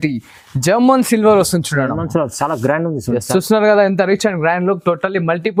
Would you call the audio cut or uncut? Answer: uncut